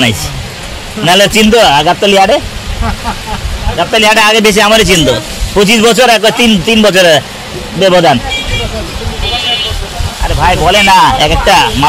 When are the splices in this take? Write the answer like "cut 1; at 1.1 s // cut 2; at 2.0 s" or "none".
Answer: none

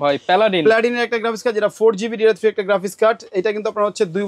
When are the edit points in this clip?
none

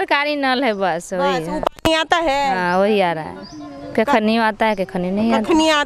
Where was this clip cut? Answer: none

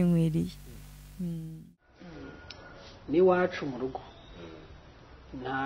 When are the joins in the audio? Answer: cut 1; at 1.6 s

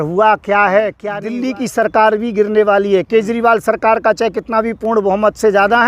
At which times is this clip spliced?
cut 1; at 1.0 s

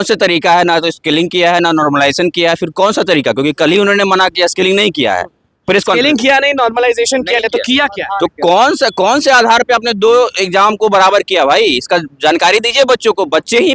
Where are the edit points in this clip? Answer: none

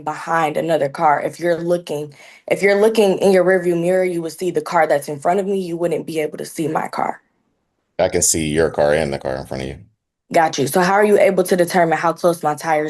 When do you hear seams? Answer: none

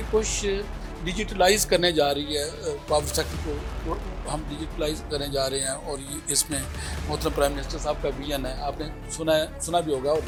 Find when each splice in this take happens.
none

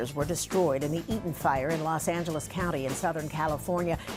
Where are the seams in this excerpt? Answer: none

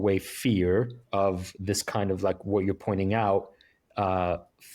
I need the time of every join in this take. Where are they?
none

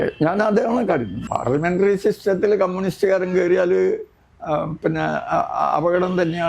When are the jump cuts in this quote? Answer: cut 1; at 1.2 s

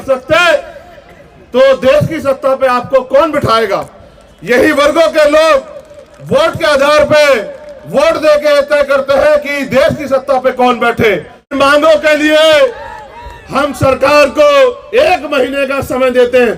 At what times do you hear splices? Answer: cut 1; at 11.5 s

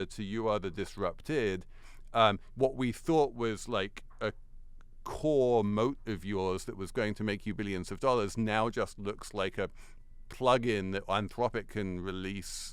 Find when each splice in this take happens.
none

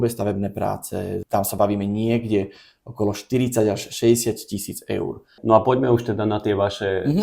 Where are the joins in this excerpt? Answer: cut 1; at 1.2 s // cut 2; at 5.3 s

